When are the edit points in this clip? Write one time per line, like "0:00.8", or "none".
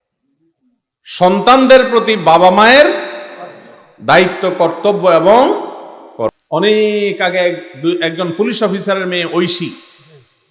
0:06.3